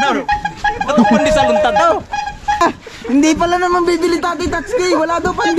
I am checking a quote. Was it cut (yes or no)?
yes